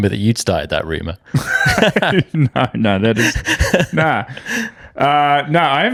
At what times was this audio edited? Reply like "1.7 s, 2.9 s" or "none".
none